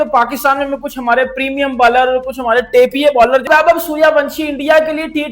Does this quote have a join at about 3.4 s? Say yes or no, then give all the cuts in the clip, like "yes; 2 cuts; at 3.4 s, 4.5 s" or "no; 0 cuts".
yes; 1 cut; at 3.4 s